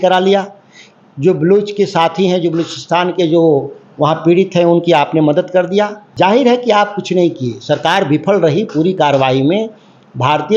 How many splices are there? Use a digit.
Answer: 1